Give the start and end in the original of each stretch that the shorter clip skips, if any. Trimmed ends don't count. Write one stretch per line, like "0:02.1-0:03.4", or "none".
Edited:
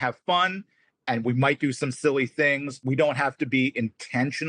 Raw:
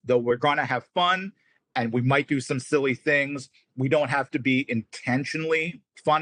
0:03.4-0:03.7

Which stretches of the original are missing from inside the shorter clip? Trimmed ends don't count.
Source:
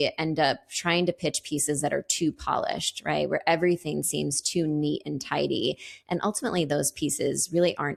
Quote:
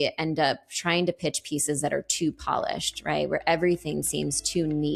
none

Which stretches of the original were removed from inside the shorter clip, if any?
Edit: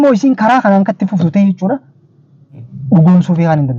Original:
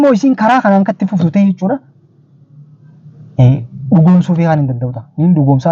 0:02.7-0:03.7

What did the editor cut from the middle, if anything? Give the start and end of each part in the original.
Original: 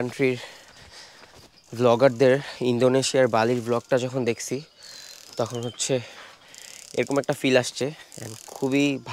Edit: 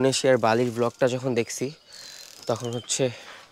none

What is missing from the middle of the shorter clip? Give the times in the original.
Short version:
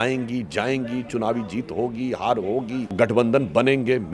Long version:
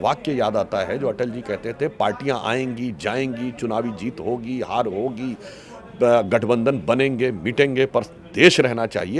0:05.4-0:06.3

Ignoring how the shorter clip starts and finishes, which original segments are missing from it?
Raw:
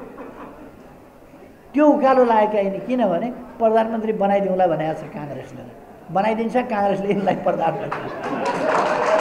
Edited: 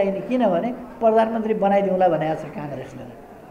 none

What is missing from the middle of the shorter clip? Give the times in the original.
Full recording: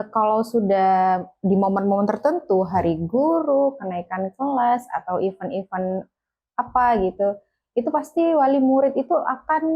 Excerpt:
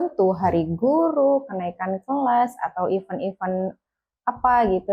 none

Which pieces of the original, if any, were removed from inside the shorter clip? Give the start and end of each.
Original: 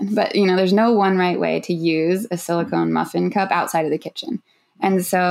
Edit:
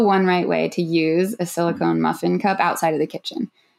none

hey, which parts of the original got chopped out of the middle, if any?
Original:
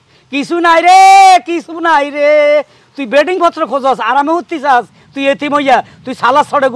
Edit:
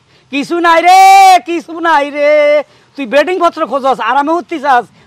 none

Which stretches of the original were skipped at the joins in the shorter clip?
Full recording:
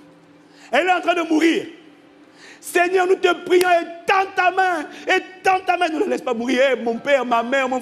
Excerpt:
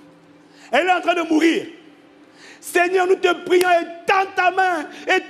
none

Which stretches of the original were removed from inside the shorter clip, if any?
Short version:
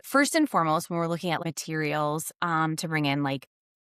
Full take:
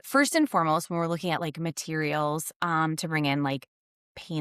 0:01.4-0:01.6

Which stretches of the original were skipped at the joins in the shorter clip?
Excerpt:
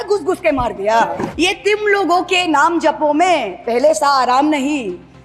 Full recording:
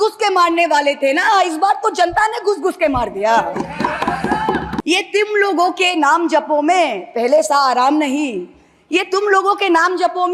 0:03.7-0:04.8

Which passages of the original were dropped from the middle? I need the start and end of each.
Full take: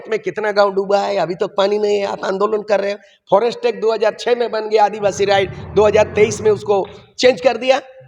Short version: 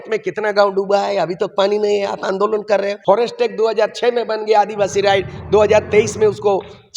0:02.9-0:03.2

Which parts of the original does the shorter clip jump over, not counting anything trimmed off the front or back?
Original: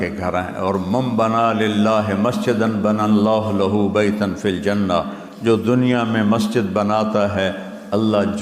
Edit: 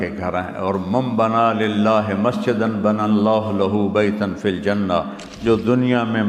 none

